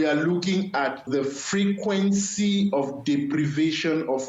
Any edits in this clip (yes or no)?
yes